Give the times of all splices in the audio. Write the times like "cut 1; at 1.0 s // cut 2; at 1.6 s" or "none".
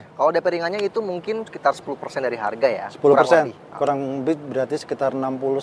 none